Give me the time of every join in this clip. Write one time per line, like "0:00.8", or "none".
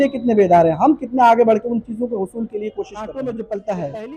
0:03.0